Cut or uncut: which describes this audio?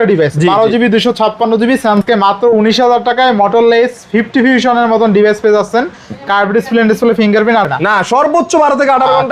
cut